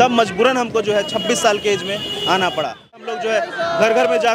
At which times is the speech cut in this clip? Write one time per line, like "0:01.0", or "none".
0:03.0